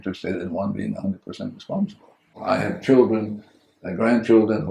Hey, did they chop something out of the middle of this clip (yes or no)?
yes